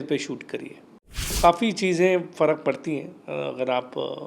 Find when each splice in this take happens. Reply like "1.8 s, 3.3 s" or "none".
1.4 s

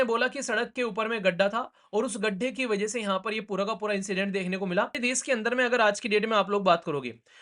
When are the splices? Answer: 5.0 s

